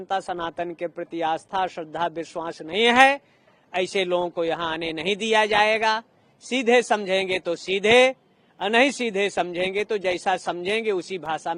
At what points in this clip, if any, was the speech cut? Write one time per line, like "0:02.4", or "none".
none